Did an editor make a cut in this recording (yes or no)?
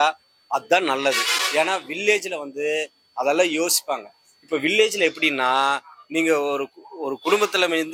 no